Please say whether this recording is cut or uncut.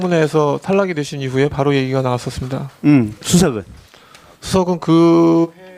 uncut